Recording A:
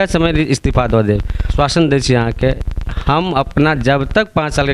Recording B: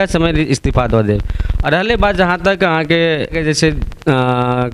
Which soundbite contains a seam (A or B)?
A